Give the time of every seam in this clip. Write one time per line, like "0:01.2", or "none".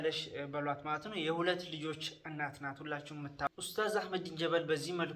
0:03.5